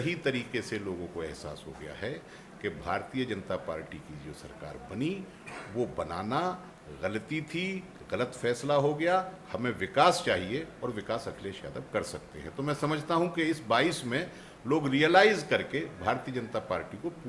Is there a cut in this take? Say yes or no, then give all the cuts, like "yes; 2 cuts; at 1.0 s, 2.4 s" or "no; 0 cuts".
no; 0 cuts